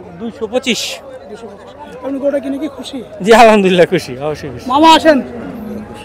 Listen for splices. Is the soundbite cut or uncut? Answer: uncut